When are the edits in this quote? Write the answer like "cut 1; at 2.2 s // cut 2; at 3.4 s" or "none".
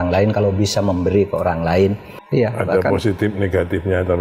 cut 1; at 2.1 s